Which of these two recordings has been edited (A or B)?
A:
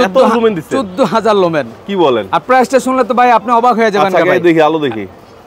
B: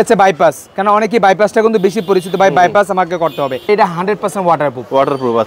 B